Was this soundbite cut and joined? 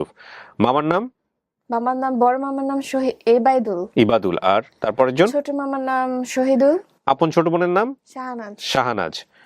yes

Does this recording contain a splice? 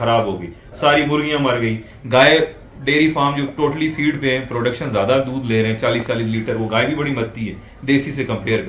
no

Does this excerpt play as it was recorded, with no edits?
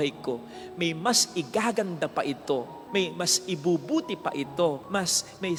yes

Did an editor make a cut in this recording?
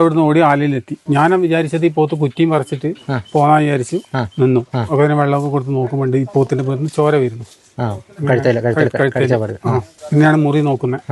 yes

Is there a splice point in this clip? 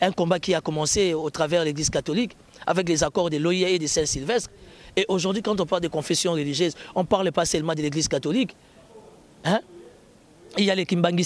no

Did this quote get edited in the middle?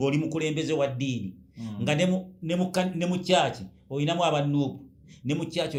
no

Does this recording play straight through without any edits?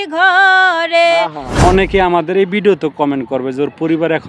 no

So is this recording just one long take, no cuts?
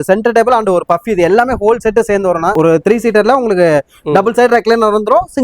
no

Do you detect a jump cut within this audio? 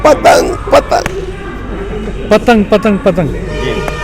no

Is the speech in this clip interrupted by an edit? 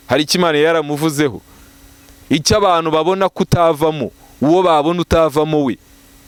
no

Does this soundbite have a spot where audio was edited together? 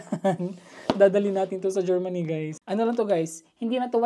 yes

